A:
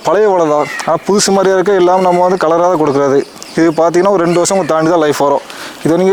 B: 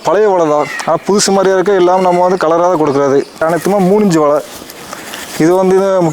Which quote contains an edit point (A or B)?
B